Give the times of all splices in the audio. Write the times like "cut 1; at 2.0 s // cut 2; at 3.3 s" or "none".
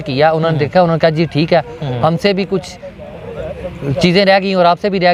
none